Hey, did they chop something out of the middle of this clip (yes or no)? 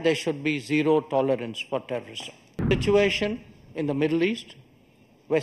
yes